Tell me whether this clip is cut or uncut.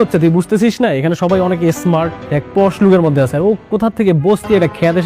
cut